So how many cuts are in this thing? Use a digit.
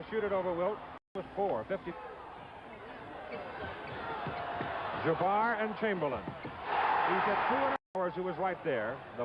0